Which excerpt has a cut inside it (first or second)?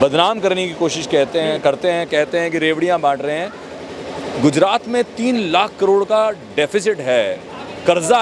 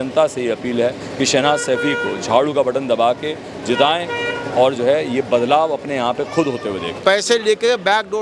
second